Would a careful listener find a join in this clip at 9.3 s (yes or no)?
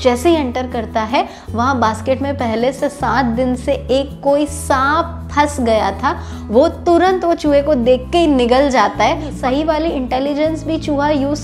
yes